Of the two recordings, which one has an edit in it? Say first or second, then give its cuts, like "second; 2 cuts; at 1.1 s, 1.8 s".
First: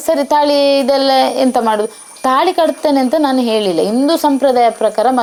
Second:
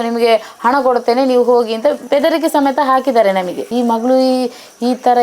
second; 1 cut; at 3.6 s